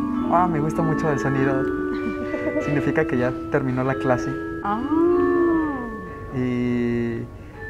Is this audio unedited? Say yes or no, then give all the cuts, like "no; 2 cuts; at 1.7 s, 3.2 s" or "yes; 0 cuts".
yes; 0 cuts